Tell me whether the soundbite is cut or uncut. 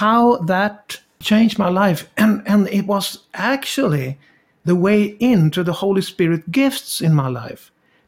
cut